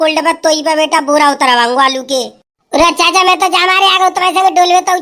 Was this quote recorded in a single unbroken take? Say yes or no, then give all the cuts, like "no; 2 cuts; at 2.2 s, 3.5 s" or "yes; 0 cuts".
yes; 0 cuts